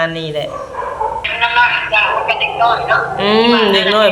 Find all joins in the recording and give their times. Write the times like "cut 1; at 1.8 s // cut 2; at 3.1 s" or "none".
cut 1; at 1.3 s